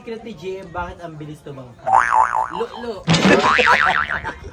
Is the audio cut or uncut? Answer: uncut